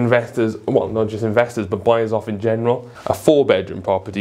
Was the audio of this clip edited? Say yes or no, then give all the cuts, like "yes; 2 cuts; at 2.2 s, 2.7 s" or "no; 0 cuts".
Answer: yes; 1 cut; at 2.9 s